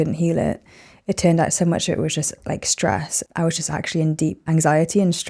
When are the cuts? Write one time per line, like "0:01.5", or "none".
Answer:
0:04.4